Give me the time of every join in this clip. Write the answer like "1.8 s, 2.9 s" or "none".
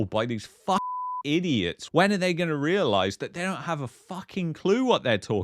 1.8 s